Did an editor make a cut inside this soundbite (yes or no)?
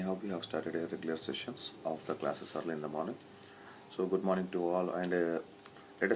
yes